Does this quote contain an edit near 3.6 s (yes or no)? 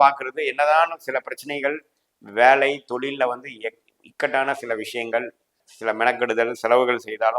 no